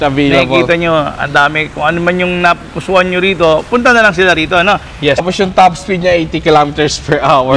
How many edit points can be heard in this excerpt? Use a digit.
1